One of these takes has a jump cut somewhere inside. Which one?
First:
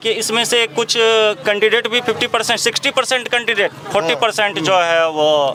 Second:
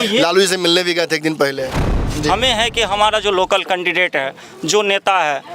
second; 1 cut; at 2.1 s

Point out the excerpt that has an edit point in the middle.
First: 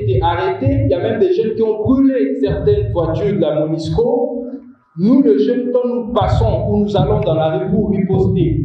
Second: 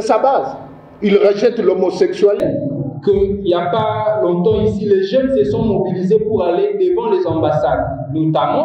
second; 1 cut; at 2.4 s

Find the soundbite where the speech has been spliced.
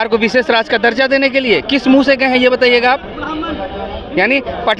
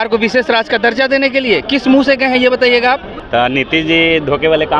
second; 1 cut; at 3.1 s

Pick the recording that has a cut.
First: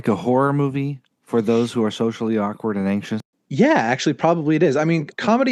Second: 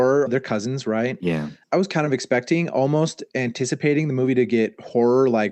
first; 1 cut; at 3.4 s

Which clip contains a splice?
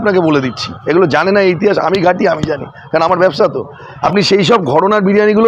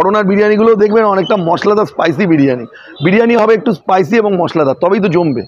first; 1 cut; at 3.9 s

